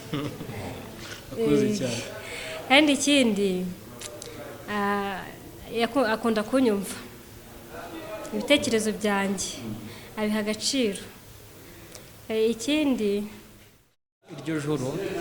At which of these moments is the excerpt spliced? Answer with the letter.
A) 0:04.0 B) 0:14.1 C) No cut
B